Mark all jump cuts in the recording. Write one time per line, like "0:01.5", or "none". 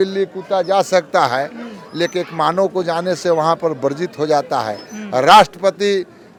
none